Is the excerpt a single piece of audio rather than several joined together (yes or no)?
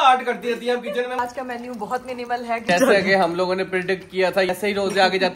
no